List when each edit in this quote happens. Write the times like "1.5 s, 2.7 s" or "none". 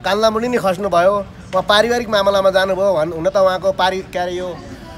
none